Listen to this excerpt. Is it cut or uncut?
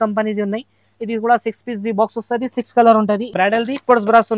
cut